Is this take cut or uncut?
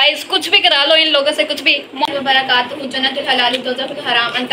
cut